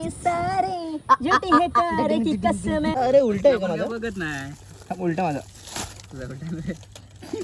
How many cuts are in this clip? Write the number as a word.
one